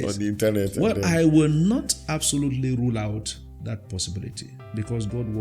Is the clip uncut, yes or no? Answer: no